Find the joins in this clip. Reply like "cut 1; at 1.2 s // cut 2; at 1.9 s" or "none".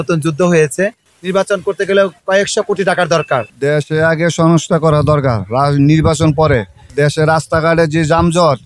cut 1; at 1.0 s // cut 2; at 3.5 s